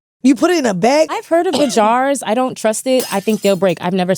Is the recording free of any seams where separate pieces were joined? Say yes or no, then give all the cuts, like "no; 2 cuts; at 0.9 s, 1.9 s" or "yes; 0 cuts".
no; 1 cut; at 1.1 s